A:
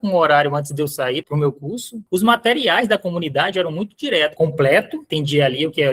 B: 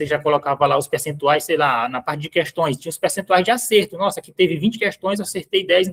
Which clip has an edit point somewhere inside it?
A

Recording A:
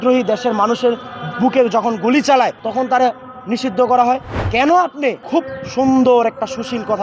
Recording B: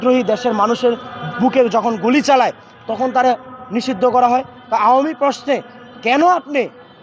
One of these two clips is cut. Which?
A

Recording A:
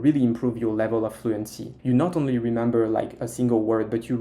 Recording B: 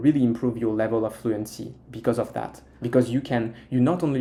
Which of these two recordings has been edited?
A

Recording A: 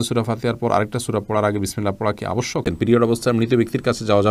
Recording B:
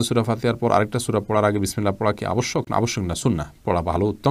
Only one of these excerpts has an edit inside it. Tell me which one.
A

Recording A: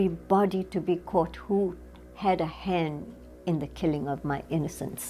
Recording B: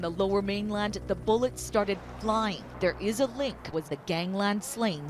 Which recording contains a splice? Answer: B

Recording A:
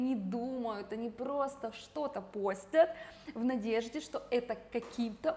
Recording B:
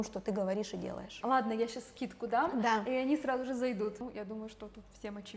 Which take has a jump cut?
B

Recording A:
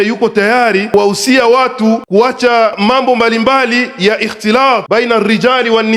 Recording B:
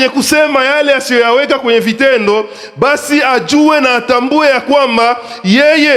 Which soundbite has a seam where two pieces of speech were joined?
A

